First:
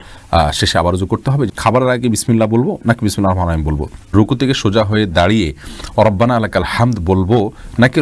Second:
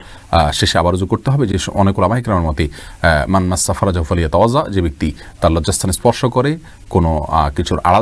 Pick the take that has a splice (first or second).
first